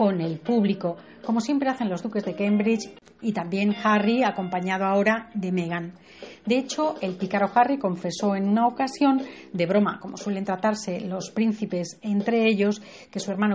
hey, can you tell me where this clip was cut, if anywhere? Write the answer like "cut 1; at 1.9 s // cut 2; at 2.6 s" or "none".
cut 1; at 3.6 s